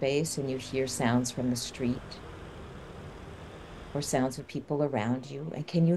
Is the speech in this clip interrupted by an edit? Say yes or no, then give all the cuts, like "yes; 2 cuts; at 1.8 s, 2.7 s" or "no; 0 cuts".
no; 0 cuts